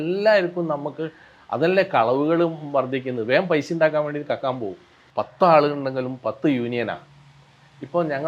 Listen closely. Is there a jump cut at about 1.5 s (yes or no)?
no